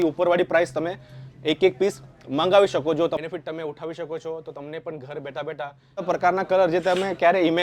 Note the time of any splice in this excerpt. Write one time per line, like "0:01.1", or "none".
0:03.2
0:06.0